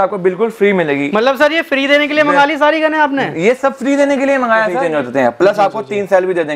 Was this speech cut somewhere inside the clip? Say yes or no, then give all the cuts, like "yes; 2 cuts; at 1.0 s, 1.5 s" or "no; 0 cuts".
yes; 1 cut; at 4.7 s